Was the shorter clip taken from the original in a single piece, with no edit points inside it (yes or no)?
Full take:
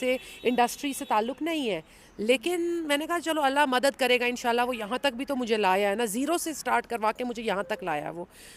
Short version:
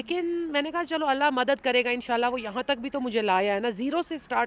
yes